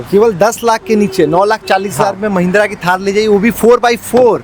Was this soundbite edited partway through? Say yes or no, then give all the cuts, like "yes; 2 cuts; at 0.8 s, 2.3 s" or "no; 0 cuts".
no; 0 cuts